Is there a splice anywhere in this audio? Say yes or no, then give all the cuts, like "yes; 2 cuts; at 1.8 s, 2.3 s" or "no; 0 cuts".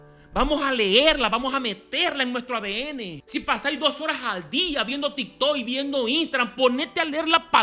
yes; 1 cut; at 3.2 s